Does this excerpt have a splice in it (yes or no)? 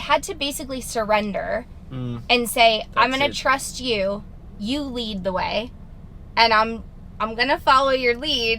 no